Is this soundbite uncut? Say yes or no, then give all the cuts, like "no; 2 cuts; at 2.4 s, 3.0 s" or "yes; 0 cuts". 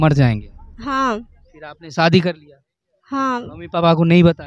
yes; 0 cuts